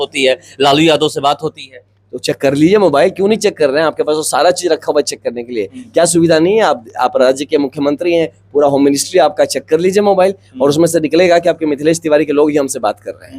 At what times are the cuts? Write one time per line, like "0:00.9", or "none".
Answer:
none